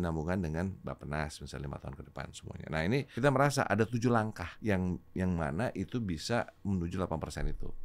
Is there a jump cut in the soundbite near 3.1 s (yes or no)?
yes